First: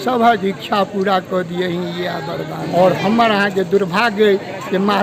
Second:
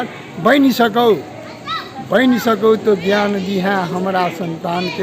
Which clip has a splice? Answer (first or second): first